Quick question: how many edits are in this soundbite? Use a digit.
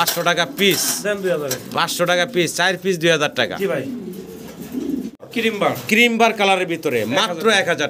1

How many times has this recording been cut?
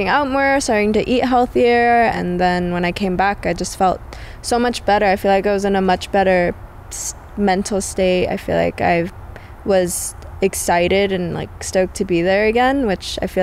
1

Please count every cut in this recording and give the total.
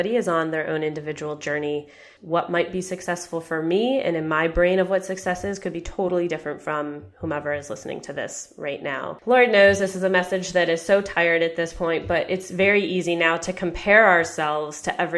2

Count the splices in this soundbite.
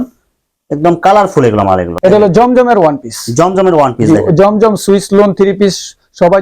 1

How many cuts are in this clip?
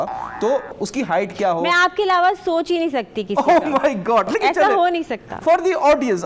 0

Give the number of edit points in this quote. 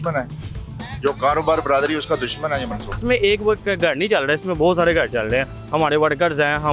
1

